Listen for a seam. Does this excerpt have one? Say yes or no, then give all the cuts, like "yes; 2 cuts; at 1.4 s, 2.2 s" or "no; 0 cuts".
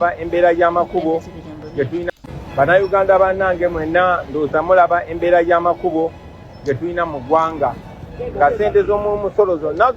yes; 1 cut; at 2.1 s